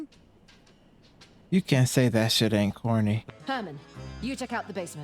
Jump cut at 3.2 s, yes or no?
yes